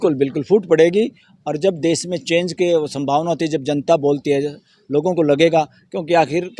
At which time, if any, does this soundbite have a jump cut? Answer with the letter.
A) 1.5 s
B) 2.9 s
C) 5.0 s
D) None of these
D